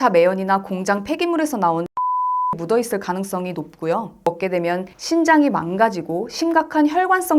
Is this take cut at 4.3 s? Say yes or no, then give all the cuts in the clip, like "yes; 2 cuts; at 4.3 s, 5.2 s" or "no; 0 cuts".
yes; 1 cut; at 4.3 s